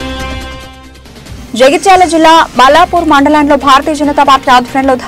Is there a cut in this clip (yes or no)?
no